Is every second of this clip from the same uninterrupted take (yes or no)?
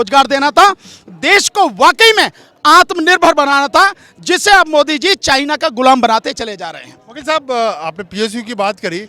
yes